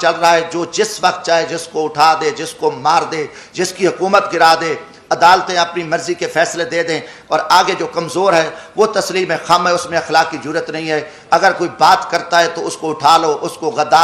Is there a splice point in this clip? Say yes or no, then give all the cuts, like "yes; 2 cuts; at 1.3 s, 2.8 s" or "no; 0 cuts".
no; 0 cuts